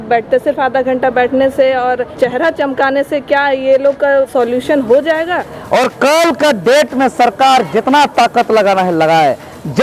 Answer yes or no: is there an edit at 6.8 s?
no